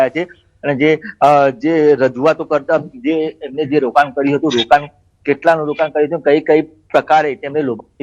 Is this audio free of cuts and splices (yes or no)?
no